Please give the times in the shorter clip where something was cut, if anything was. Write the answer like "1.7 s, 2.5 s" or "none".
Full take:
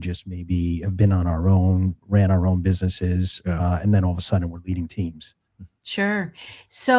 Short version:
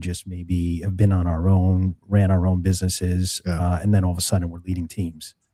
none